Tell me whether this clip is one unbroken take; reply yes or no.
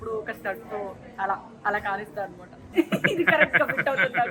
no